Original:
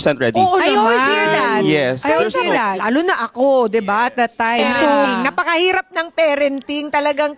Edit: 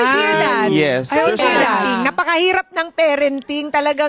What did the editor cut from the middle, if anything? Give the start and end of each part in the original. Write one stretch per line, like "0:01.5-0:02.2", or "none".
0:02.8-0:05.1